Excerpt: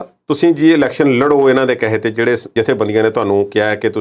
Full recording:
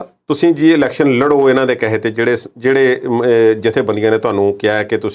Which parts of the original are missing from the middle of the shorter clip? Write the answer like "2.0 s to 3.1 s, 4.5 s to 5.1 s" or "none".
2.5 s to 3.6 s